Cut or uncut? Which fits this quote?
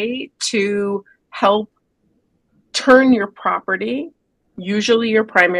uncut